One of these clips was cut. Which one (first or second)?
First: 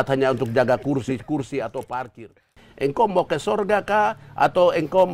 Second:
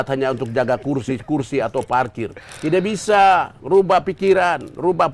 first